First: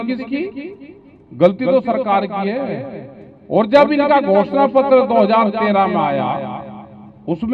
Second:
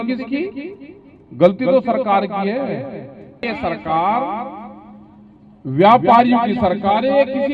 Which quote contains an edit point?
second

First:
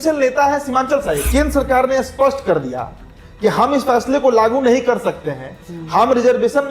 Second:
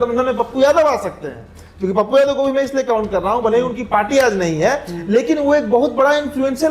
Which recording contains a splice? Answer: first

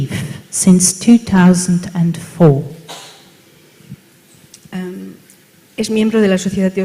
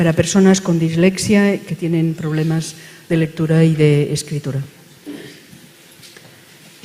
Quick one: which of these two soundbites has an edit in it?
first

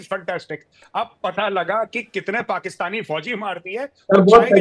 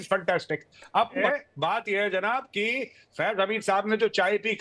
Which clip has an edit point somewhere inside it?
second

